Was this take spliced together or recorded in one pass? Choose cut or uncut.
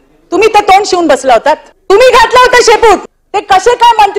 cut